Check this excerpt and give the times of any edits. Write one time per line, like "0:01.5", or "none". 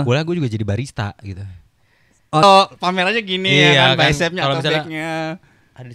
0:02.4